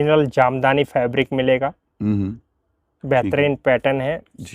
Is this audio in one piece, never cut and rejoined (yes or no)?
yes